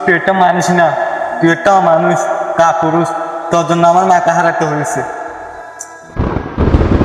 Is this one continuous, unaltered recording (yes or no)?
yes